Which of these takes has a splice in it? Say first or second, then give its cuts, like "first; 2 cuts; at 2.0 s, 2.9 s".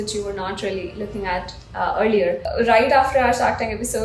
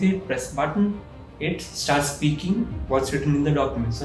first; 1 cut; at 2.4 s